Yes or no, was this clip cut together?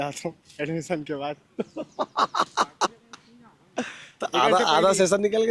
no